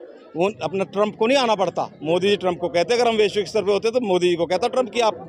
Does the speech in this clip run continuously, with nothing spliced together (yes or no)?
yes